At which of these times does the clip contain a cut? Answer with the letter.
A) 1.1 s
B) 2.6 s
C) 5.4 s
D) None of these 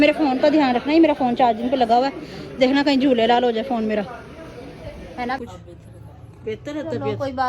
C